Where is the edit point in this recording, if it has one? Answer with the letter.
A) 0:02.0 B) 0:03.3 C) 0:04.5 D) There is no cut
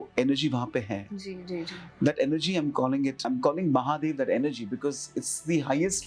B